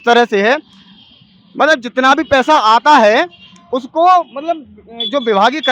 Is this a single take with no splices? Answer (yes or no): yes